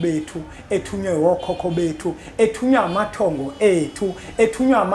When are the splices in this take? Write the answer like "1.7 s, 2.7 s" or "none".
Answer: none